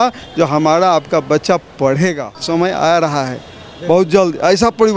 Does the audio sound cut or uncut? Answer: cut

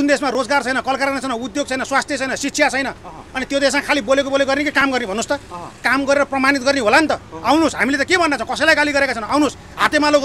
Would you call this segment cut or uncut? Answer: uncut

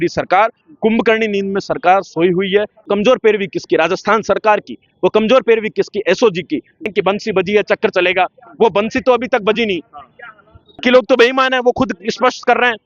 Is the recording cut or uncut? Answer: cut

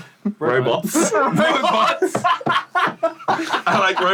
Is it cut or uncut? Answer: uncut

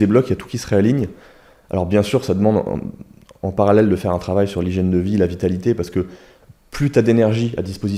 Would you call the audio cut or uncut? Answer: uncut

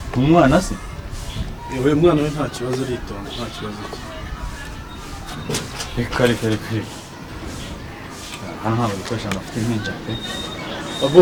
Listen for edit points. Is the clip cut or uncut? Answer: uncut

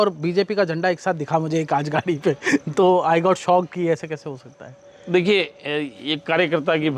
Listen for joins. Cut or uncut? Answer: uncut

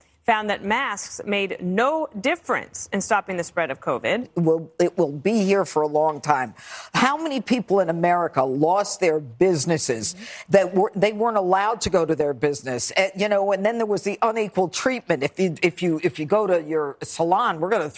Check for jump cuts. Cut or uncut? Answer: cut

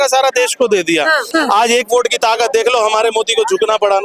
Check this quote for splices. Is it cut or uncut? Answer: cut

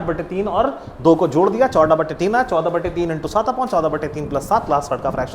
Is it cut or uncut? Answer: uncut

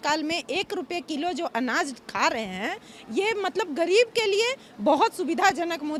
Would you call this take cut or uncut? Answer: uncut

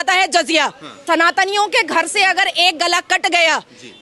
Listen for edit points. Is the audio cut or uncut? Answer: cut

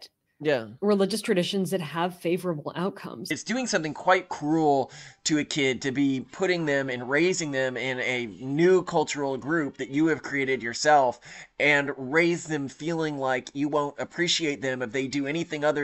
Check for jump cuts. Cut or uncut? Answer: cut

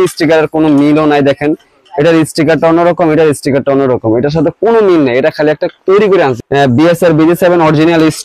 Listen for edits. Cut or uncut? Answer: cut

